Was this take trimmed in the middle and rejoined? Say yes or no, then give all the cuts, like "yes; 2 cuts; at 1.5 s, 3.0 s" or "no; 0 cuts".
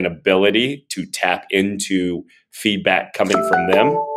no; 0 cuts